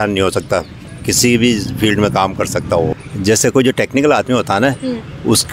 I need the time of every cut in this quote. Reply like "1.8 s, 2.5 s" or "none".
2.9 s